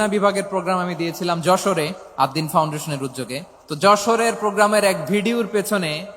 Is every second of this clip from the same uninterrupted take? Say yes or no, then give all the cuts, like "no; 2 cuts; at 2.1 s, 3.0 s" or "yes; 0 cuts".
no; 2 cuts; at 2.0 s, 3.6 s